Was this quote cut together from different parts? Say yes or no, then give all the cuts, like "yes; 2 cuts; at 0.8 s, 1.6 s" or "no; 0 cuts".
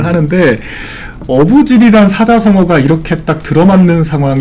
no; 0 cuts